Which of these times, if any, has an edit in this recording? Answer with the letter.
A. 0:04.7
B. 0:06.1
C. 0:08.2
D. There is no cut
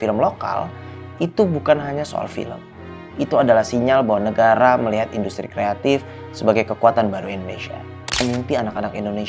C